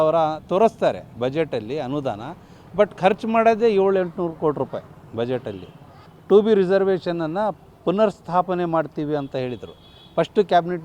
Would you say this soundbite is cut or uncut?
uncut